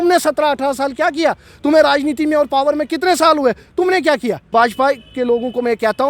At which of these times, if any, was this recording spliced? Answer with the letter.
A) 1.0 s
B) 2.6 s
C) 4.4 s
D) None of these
C